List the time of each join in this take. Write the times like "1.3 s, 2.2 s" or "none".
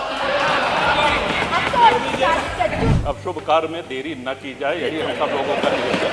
2.9 s